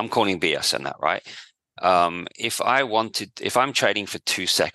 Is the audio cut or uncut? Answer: uncut